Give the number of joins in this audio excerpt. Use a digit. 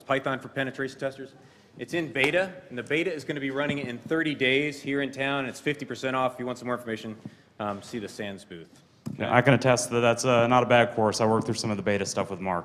1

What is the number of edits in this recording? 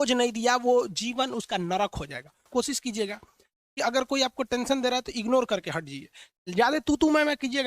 1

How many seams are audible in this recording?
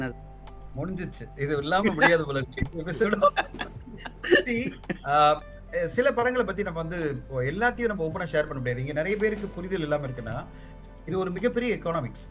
0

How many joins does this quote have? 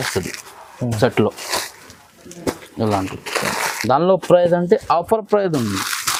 0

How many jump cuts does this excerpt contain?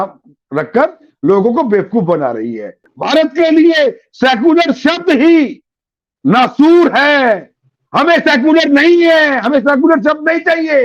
1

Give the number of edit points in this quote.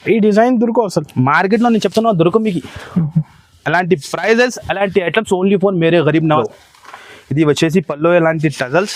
1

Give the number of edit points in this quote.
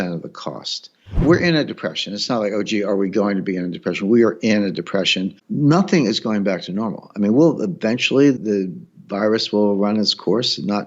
3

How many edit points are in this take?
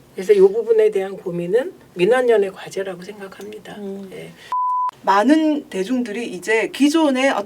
1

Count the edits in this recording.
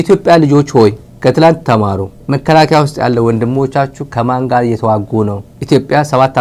0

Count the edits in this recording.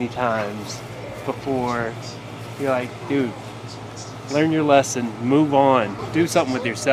1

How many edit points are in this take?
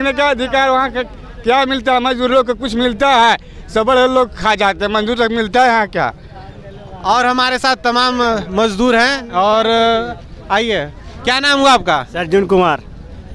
0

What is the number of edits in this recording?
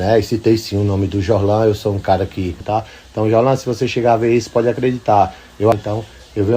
2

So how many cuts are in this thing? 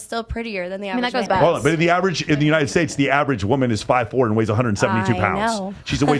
1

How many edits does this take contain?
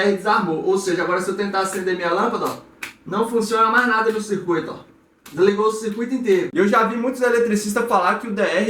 1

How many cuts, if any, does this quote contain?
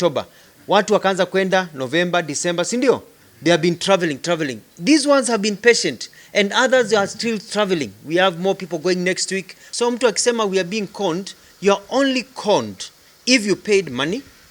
1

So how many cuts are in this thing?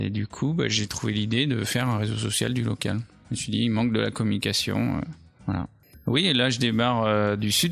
1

